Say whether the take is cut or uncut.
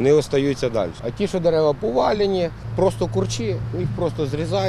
cut